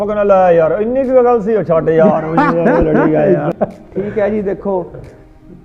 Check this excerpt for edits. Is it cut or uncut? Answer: cut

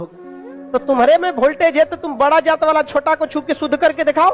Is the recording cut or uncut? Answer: uncut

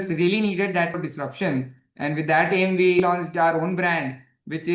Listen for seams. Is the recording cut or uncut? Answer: cut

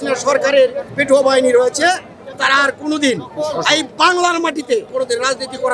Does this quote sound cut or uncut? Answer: cut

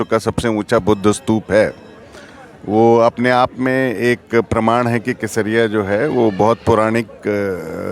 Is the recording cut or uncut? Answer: uncut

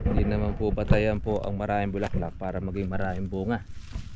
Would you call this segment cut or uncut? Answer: uncut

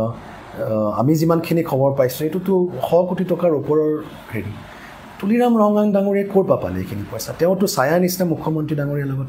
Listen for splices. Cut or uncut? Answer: uncut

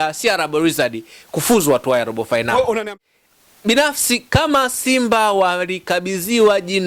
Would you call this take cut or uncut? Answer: cut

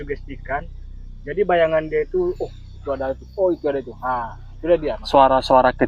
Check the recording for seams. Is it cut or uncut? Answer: uncut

